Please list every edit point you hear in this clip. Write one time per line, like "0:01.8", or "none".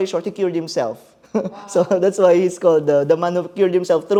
none